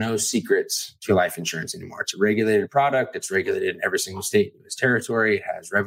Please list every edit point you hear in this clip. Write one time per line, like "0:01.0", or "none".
none